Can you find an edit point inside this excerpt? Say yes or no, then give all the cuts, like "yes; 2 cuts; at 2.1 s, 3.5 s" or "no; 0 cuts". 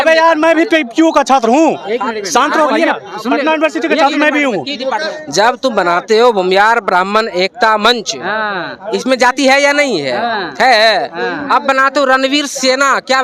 yes; 1 cut; at 4.9 s